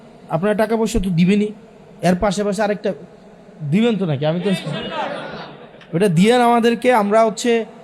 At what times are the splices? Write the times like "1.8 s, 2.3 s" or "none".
none